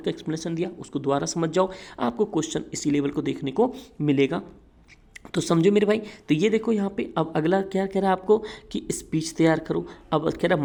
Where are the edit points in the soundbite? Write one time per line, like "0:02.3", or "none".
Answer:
none